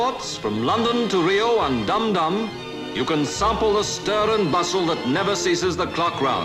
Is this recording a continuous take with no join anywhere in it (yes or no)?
no